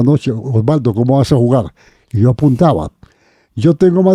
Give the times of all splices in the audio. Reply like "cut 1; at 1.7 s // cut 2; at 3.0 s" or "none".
none